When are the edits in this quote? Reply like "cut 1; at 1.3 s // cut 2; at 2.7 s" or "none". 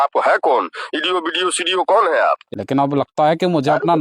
cut 1; at 2.5 s